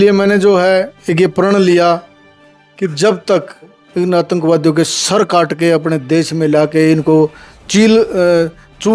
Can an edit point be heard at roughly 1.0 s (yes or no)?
yes